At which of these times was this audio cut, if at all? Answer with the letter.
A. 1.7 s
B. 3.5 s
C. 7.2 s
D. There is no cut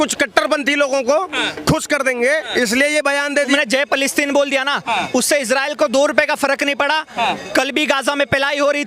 B